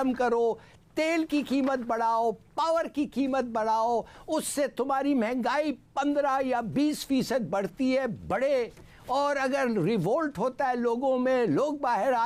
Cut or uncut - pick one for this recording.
uncut